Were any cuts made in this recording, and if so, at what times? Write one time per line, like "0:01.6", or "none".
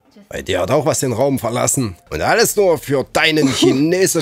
0:02.1